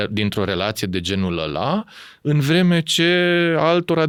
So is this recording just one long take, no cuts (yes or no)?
yes